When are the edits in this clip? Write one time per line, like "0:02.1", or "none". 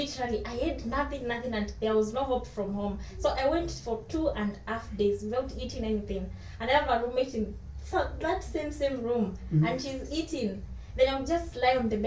none

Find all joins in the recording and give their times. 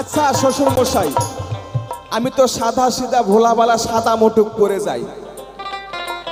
none

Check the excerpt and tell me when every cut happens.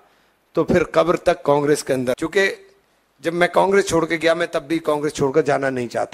0:02.2

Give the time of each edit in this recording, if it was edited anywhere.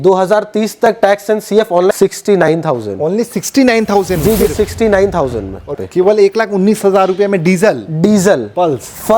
0:01.9
0:05.7

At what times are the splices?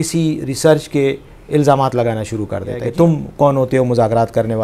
0:02.9

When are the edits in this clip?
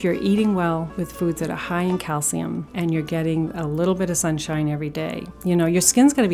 0:00.9
0:02.7
0:05.3

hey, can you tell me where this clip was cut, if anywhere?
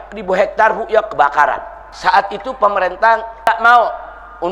0:01.8
0:03.5

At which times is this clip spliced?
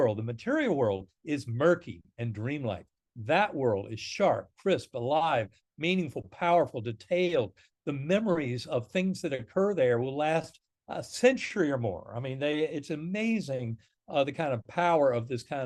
none

